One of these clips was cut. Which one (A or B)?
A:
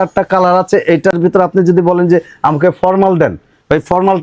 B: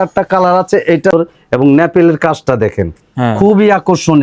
B